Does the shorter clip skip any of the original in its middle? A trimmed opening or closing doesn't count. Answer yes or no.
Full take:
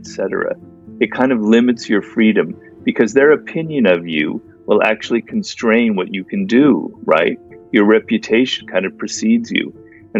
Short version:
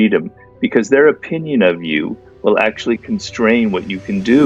no